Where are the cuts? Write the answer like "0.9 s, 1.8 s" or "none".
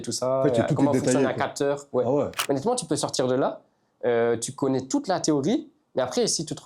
2.4 s